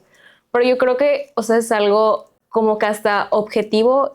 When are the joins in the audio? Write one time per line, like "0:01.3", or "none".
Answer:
0:02.3

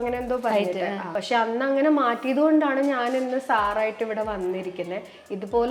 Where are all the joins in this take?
0:01.1

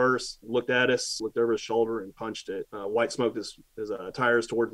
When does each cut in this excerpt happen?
0:01.2
0:02.4

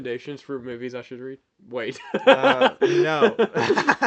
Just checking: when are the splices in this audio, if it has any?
none

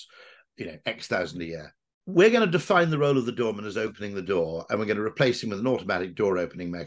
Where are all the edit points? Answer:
0:02.0

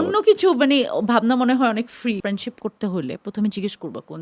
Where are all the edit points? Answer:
0:02.2

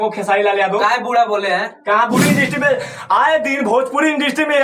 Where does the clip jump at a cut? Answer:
0:02.2

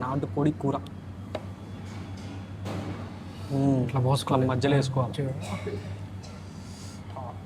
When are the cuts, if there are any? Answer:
none

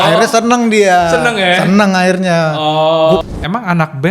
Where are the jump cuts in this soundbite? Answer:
0:03.2

